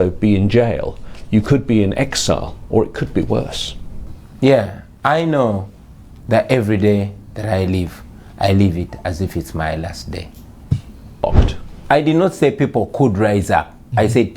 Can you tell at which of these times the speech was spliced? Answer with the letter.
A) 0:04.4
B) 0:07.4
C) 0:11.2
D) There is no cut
C